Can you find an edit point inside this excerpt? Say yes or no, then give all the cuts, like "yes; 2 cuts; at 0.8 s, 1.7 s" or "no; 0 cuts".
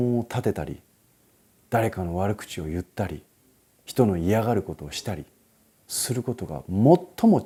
no; 0 cuts